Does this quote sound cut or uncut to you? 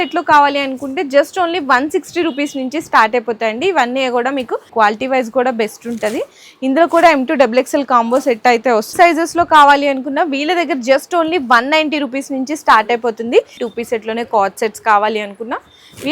cut